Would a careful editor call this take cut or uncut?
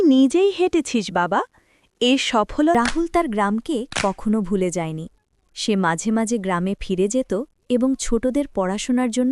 cut